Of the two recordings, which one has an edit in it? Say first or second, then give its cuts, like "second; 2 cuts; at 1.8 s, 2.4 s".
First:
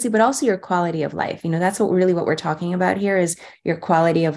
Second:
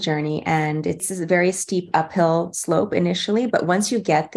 second; 1 cut; at 1.0 s